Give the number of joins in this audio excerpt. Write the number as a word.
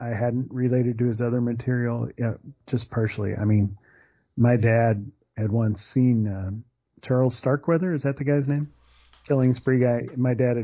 one